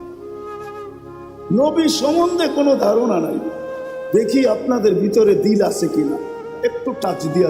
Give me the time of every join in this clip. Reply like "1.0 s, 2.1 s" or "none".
none